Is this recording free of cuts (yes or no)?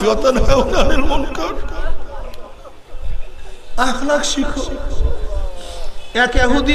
yes